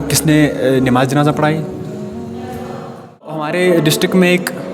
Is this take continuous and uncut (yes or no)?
no